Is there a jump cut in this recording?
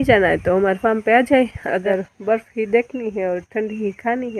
yes; 1 cut; at 1.8 s

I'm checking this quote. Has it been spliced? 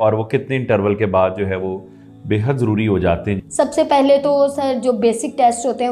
yes; 1 cut; at 3.5 s

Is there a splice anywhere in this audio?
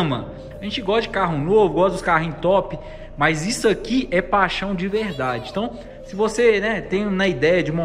no; 0 cuts

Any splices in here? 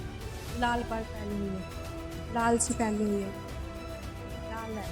no; 0 cuts

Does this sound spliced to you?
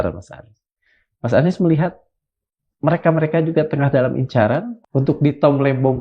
yes; 1 cut; at 4.8 s

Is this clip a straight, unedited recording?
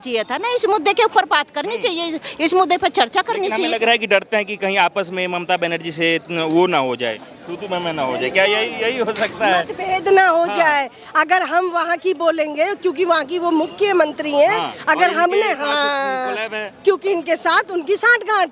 yes; 0 cuts

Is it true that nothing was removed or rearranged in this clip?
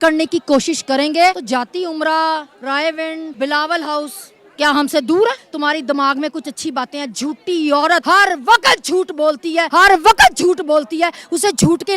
no; 5 cuts; at 1.4 s, 3.3 s, 5.5 s, 8.0 s, 9.7 s

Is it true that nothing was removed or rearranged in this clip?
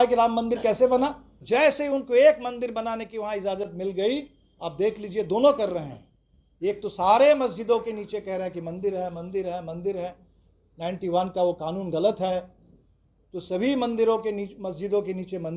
no; 1 cut; at 1.3 s

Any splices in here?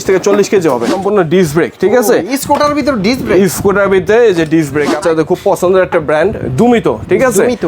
yes; 2 cuts; at 0.9 s, 4.9 s

